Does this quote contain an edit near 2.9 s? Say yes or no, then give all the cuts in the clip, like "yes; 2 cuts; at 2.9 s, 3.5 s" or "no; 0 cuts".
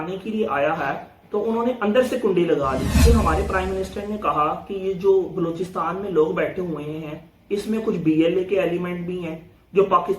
yes; 1 cut; at 2.9 s